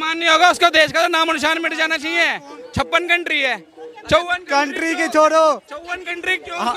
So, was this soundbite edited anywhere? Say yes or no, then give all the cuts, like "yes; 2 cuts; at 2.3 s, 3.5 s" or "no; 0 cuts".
yes; 1 cut; at 2.6 s